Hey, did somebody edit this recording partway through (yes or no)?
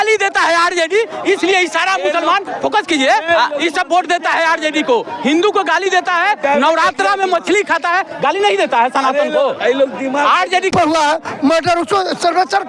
yes